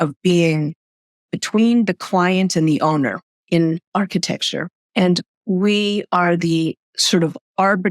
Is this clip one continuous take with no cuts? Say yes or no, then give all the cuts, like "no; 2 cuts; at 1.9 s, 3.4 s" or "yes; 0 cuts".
no; 1 cut; at 1.3 s